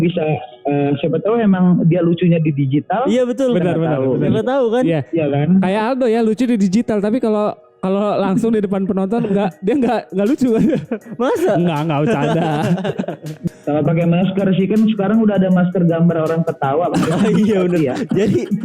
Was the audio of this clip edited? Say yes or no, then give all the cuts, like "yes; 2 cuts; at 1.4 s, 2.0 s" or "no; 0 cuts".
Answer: yes; 1 cut; at 13.3 s